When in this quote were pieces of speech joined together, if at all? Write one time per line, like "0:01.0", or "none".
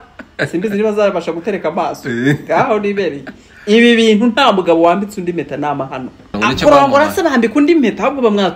0:06.4